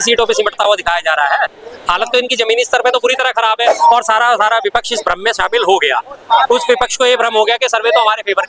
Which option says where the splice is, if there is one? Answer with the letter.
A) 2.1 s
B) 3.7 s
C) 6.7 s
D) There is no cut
B